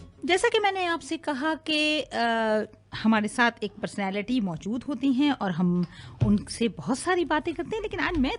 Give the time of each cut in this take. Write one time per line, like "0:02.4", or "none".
0:02.3